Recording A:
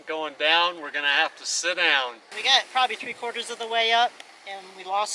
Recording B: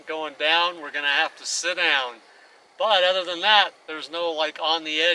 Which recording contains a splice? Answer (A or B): A